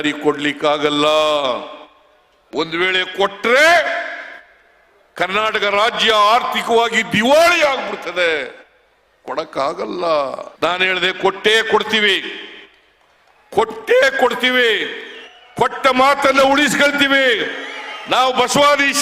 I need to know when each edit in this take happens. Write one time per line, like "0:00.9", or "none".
none